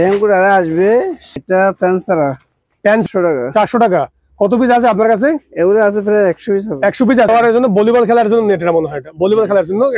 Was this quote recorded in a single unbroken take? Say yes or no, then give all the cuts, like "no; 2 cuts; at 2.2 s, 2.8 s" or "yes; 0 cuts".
no; 3 cuts; at 1.4 s, 3.0 s, 7.3 s